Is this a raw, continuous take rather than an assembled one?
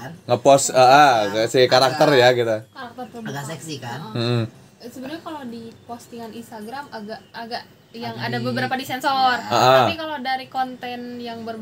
yes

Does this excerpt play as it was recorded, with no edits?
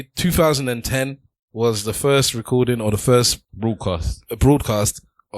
no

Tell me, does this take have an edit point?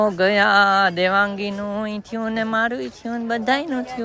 no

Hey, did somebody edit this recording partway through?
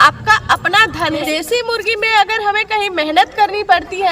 yes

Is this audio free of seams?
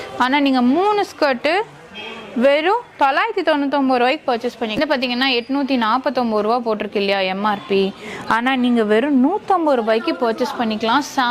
no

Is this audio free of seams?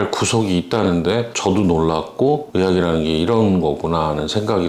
yes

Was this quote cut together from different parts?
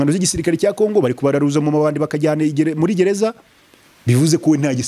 no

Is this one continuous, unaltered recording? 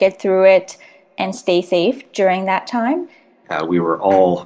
no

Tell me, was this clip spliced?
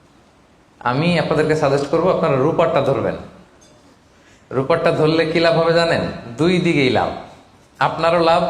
no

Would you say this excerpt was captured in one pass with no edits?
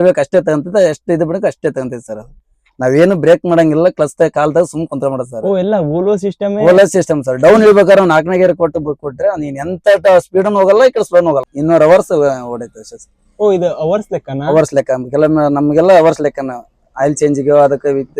no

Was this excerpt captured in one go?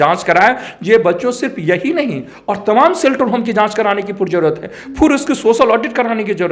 yes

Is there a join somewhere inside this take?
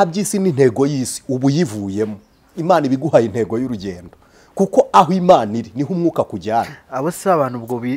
no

